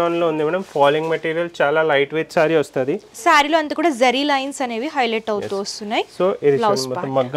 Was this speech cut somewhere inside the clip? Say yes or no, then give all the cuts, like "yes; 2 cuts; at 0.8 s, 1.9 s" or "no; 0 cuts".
no; 0 cuts